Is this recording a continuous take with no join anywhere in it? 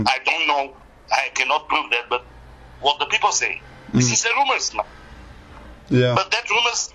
yes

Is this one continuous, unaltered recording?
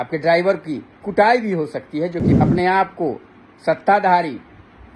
no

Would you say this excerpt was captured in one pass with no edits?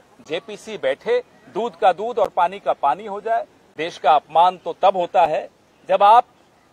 no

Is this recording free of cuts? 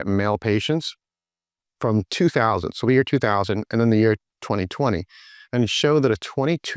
yes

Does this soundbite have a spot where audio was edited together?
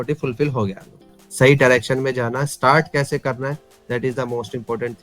yes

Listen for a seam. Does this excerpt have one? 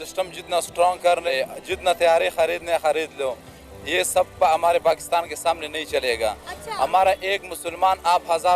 yes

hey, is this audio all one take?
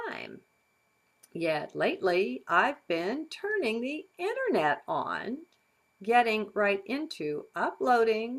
yes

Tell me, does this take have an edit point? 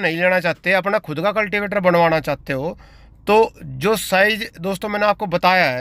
no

